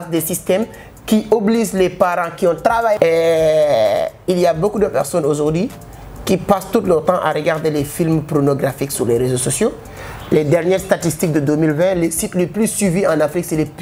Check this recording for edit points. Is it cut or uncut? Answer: cut